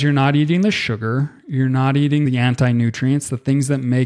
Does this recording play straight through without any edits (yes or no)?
no